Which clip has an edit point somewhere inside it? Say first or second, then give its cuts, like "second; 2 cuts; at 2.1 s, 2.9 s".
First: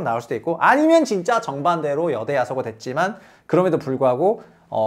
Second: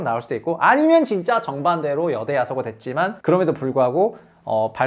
second; 1 cut; at 3.2 s